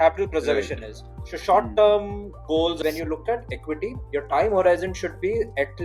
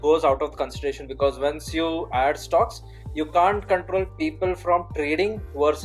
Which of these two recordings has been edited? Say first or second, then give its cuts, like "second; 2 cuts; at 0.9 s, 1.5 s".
first; 1 cut; at 2.8 s